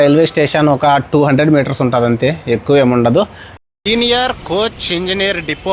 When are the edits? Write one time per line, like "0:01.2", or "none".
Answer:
0:03.4